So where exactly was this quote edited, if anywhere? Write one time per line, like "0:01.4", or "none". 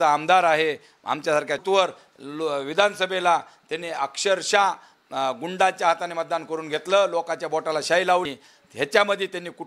0:01.6
0:08.3

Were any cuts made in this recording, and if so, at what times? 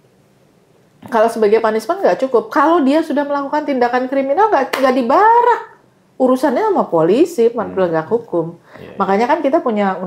none

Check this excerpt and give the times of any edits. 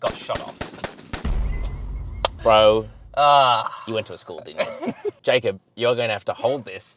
0:05.2

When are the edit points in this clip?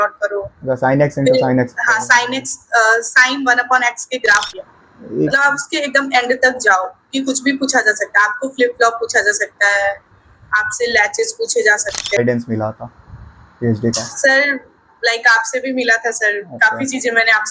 0:04.5
0:12.2

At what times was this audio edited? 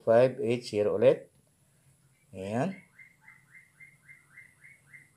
none

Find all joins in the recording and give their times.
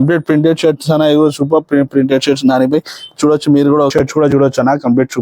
0:03.9

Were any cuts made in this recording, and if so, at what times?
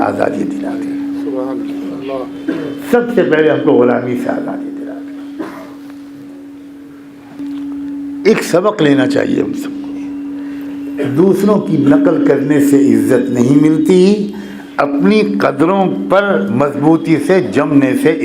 0:07.4

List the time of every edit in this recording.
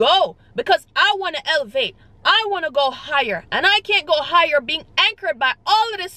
none

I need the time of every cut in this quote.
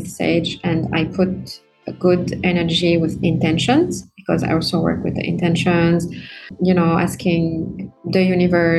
0:06.4

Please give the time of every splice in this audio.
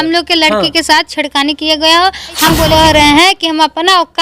0:02.7

